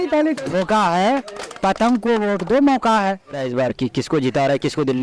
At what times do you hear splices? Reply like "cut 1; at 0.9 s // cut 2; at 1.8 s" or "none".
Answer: cut 1; at 3.5 s